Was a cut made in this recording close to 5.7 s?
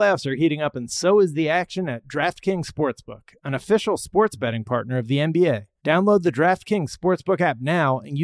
yes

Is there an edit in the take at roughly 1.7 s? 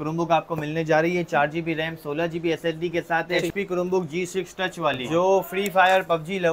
no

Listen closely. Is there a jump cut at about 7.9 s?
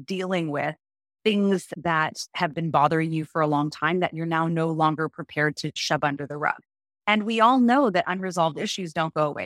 no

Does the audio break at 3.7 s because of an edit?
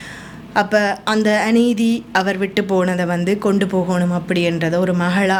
no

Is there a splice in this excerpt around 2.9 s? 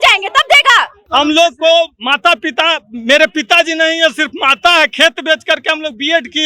no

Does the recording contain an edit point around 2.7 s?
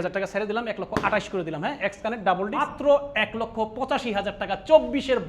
yes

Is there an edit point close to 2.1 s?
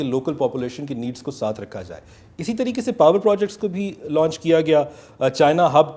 no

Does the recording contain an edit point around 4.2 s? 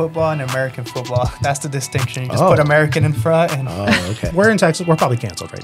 yes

